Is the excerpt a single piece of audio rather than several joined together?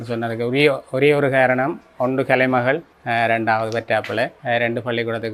no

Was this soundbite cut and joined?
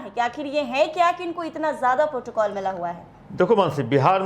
no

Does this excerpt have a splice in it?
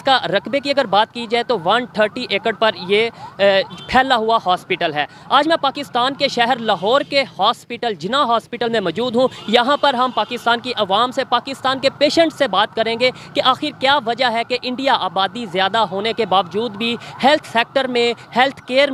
no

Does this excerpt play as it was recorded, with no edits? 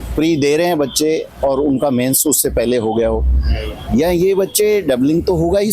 yes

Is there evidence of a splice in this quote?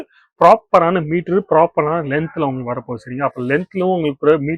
no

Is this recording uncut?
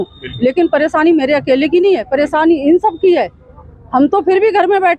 yes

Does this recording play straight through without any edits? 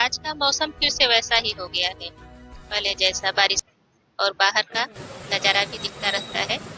no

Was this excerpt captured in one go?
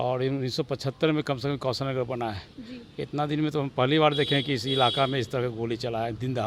yes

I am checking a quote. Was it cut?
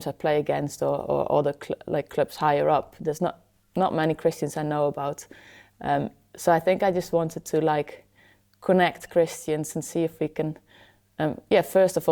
no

